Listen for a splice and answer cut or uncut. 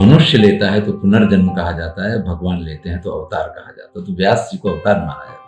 uncut